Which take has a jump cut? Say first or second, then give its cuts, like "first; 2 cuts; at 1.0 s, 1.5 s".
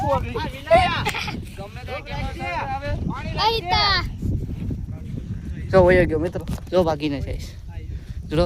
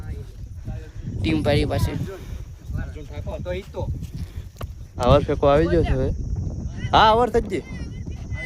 second; 1 cut; at 5.0 s